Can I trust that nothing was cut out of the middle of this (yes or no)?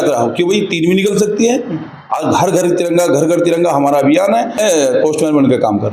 no